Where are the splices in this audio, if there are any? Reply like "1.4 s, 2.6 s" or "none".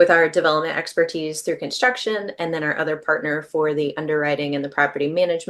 none